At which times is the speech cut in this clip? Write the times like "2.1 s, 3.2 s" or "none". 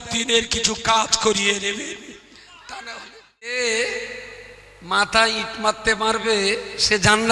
3.5 s